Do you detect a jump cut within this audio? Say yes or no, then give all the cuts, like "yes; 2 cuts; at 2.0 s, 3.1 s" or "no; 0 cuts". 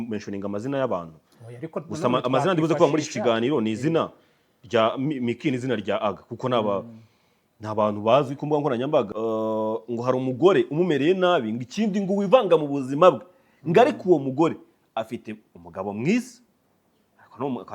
yes; 1 cut; at 9.1 s